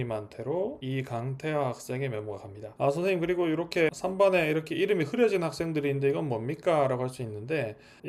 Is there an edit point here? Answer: yes; 1 cut; at 2.6 s

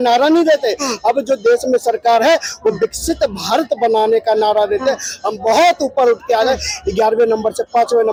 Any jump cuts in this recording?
no; 0 cuts

